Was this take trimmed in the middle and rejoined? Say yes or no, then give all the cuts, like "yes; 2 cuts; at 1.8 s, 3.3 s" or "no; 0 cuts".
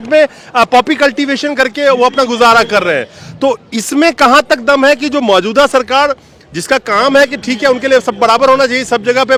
no; 0 cuts